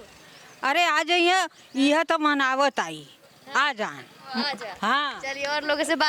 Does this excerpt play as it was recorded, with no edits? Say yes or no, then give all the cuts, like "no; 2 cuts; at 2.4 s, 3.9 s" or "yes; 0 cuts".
yes; 0 cuts